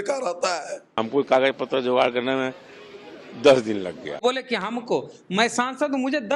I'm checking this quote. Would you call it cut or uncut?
cut